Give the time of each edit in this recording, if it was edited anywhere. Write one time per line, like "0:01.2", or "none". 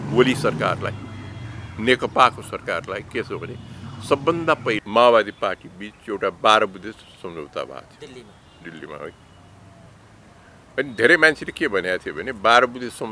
0:04.8